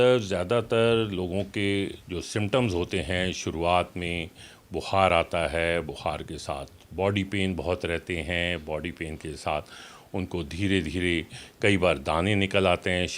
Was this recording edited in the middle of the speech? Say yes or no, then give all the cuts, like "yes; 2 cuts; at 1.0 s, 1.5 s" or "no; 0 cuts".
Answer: no; 0 cuts